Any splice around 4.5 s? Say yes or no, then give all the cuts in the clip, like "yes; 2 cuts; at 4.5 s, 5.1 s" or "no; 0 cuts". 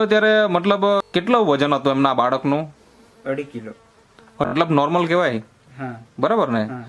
yes; 2 cuts; at 1.1 s, 4.5 s